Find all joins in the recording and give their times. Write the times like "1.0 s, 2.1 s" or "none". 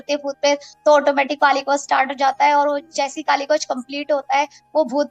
none